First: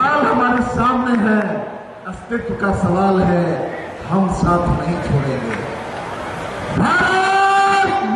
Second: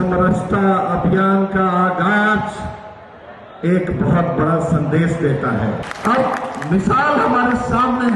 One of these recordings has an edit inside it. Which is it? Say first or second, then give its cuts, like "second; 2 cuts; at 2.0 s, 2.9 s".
second; 1 cut; at 5.9 s